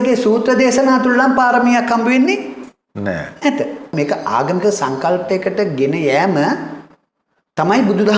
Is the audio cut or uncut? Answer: cut